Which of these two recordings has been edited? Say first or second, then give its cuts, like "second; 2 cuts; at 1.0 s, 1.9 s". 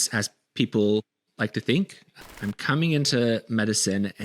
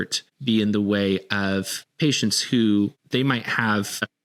first; 1 cut; at 2.4 s